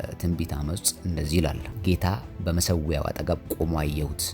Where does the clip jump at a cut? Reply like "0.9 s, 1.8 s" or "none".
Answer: 1.7 s